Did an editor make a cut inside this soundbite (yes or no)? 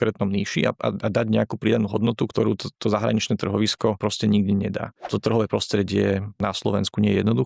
yes